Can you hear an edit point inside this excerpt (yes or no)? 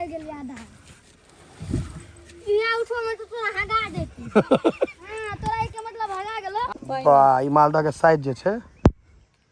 yes